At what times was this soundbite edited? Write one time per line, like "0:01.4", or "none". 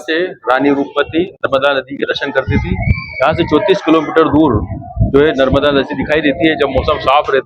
none